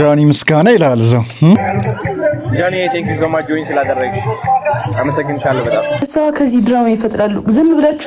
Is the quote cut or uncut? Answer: cut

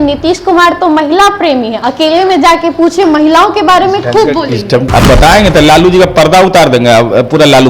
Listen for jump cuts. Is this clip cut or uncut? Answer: cut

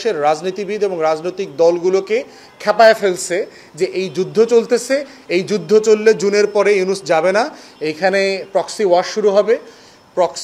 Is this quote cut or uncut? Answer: uncut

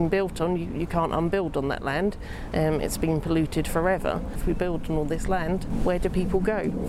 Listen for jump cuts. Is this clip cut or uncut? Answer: cut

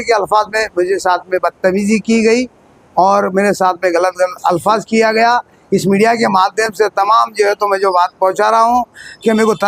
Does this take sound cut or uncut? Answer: uncut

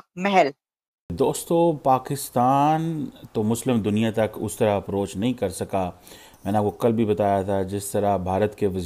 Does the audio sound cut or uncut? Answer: cut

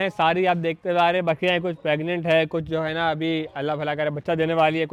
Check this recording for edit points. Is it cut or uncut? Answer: uncut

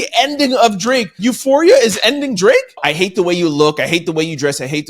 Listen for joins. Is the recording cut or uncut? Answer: cut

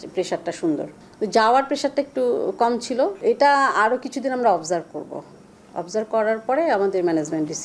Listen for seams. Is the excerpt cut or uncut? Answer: cut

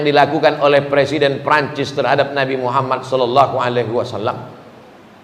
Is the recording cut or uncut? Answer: uncut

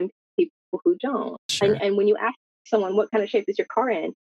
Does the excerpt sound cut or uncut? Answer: uncut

